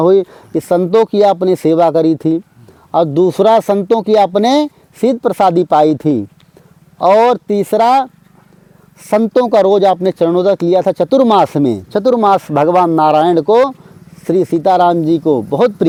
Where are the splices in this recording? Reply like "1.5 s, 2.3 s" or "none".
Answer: none